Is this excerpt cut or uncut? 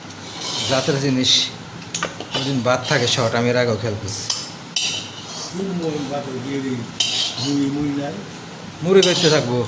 uncut